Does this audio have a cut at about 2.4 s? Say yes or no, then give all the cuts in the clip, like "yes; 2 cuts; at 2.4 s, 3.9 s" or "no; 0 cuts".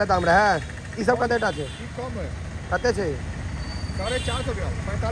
no; 0 cuts